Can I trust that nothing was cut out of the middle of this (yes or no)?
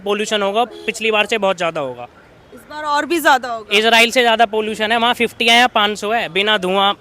no